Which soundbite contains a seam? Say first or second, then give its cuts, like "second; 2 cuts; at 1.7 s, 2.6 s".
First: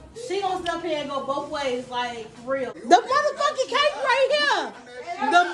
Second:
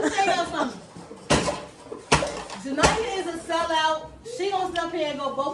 first; 1 cut; at 2.7 s